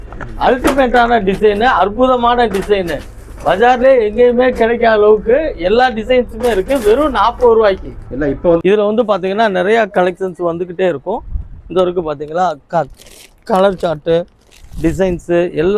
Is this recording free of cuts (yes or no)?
no